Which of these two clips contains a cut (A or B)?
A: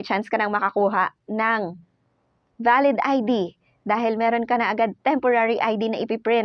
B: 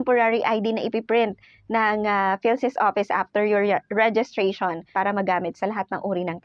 B